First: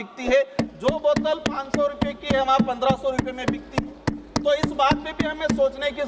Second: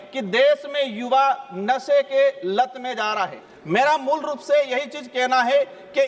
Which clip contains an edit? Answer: second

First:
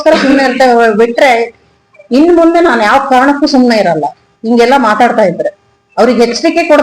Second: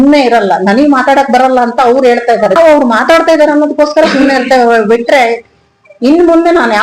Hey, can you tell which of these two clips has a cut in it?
second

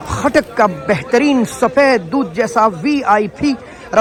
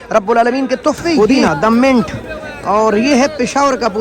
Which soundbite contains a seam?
second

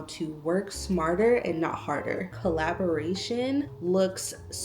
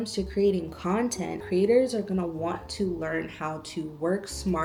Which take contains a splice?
first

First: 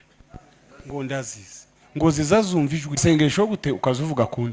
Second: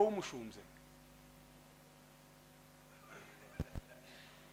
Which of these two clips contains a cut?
first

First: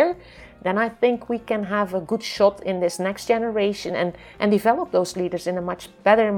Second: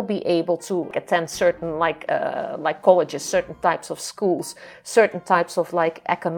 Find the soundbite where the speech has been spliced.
second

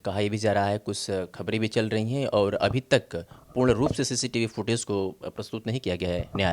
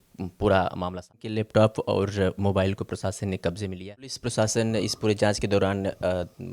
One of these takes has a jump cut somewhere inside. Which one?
second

